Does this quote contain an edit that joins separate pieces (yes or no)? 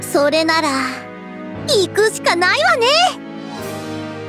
yes